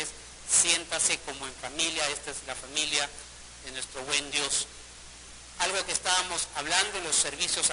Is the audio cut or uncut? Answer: cut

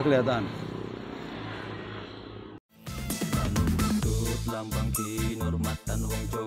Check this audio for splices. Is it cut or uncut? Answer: cut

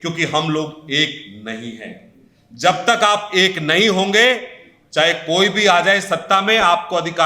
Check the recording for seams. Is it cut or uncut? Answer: uncut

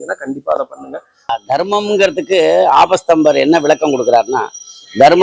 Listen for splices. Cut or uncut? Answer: cut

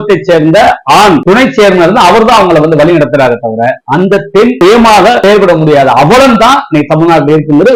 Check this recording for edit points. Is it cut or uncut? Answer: uncut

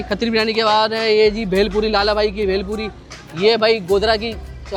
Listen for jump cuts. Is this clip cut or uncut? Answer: uncut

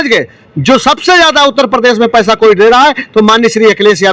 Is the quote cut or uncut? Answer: uncut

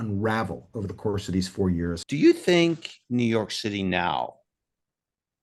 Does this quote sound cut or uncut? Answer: cut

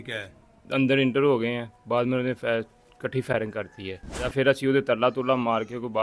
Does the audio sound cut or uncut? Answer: cut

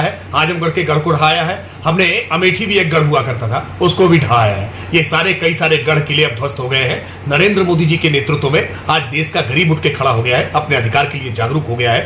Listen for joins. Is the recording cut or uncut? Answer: uncut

